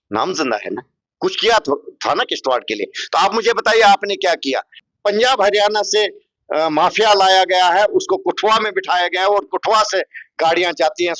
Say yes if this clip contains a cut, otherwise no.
yes